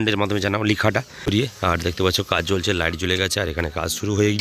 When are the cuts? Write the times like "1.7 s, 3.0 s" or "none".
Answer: 1.3 s